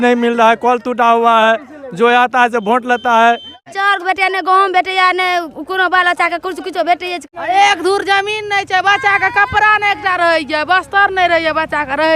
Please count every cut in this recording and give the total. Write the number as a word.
two